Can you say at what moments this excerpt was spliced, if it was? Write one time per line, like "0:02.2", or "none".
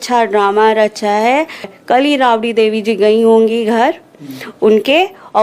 0:01.7